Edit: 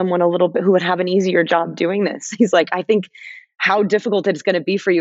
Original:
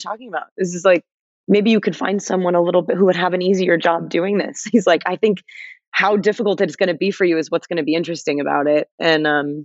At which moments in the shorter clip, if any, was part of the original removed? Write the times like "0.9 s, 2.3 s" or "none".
none